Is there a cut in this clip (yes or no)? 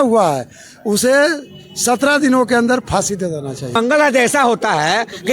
yes